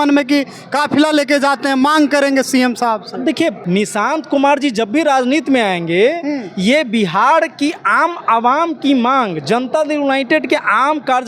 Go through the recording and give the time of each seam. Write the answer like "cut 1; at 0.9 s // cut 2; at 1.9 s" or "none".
cut 1; at 3.6 s